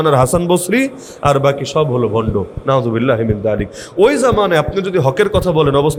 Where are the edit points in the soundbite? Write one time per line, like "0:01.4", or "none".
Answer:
none